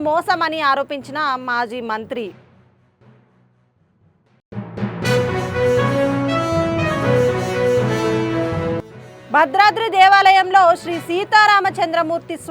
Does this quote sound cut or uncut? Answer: cut